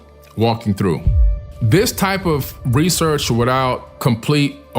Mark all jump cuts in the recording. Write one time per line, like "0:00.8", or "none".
0:01.4